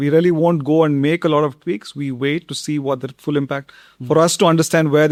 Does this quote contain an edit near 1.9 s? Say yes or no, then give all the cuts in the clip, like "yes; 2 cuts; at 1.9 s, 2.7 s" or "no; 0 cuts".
no; 0 cuts